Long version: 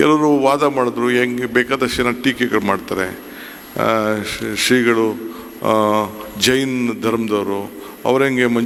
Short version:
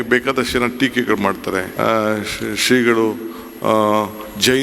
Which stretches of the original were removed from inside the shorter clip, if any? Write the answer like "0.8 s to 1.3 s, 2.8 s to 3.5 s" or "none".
3.1 s to 3.7 s